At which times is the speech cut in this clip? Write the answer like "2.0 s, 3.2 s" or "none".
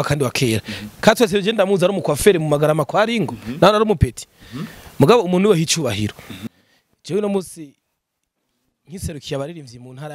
6.3 s